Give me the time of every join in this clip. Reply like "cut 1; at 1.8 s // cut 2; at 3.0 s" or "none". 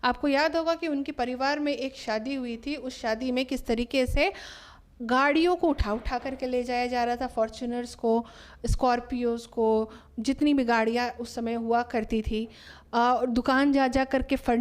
none